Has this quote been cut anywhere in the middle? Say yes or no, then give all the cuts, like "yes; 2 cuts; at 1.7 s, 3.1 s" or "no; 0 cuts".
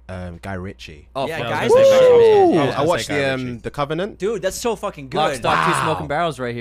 no; 0 cuts